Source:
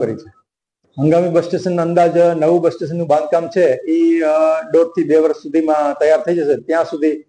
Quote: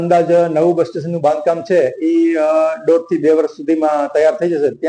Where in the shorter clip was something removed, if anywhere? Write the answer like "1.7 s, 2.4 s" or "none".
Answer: none